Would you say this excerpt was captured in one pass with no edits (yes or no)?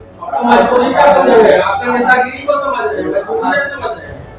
yes